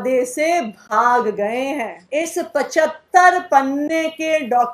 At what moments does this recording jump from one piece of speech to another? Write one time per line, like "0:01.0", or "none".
0:01.9